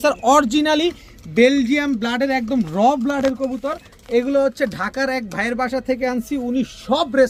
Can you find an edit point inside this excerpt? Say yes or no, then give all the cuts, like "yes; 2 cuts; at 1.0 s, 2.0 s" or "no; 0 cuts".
no; 0 cuts